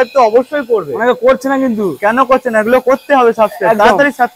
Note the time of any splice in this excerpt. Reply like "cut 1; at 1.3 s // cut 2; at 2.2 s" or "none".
none